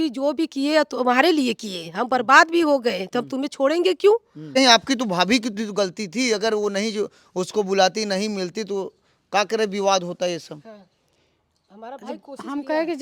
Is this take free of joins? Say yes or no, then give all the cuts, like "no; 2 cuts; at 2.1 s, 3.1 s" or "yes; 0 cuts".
no; 1 cut; at 4.5 s